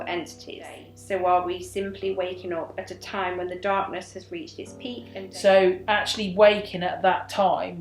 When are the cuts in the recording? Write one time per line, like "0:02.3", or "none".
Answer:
0:00.8
0:05.2